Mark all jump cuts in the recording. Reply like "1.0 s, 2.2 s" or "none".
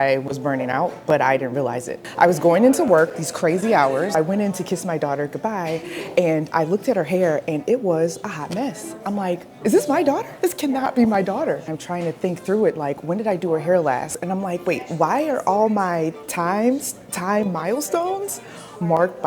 2.0 s, 4.1 s, 9.5 s, 11.7 s, 14.2 s